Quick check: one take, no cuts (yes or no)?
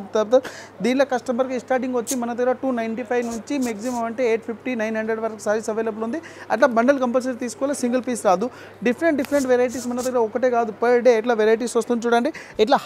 yes